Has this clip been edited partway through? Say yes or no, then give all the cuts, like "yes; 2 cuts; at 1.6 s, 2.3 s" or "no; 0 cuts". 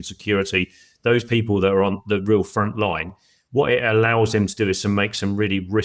no; 0 cuts